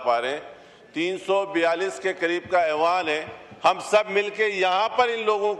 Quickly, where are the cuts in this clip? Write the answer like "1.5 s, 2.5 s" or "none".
none